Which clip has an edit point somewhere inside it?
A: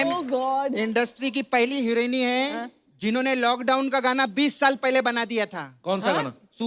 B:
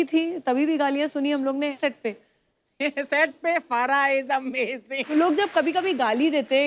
B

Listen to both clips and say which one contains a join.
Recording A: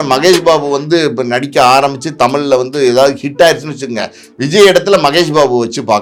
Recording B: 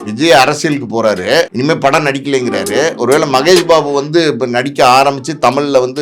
B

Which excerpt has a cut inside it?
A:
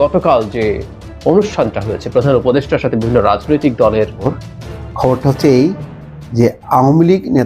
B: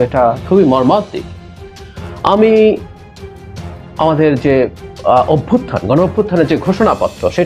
A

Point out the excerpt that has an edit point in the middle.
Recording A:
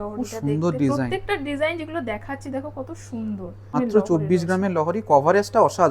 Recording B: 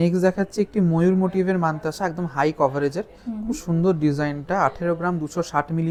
A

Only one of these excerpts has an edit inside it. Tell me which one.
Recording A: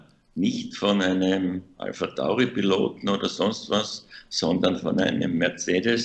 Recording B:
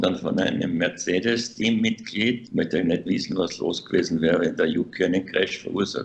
B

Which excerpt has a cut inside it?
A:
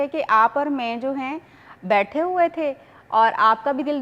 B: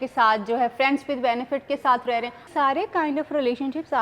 B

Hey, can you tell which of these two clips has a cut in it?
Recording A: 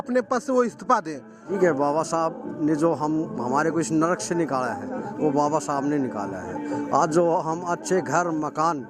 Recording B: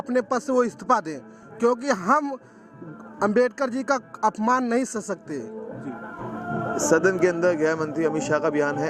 A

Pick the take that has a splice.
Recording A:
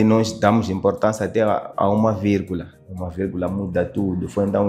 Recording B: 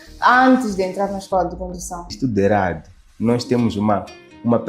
B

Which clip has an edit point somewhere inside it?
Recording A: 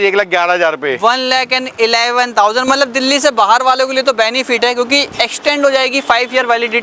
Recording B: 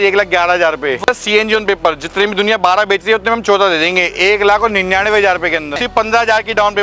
B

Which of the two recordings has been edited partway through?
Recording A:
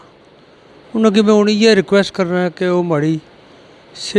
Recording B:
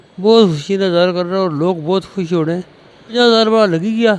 B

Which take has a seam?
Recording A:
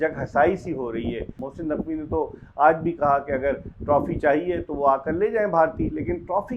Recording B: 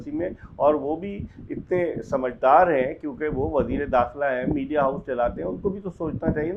A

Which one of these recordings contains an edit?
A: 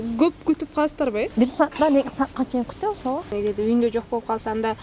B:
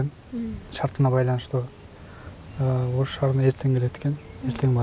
A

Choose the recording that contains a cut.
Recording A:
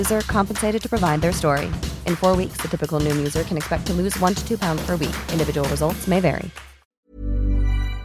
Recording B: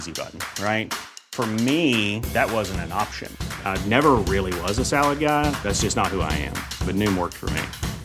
A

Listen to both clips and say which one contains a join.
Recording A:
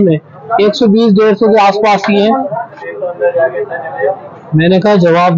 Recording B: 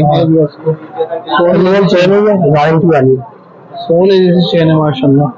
A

